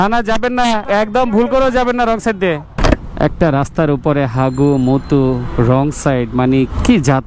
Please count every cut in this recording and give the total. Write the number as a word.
one